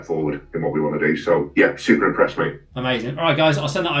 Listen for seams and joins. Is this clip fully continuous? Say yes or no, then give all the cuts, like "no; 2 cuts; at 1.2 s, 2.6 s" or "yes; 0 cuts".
yes; 0 cuts